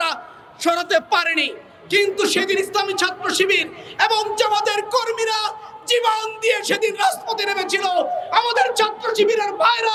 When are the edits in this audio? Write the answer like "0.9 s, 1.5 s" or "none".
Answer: none